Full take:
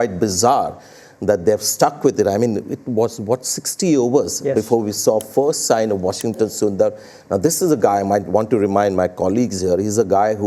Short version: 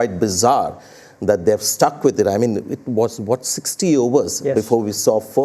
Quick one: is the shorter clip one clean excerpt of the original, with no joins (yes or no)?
yes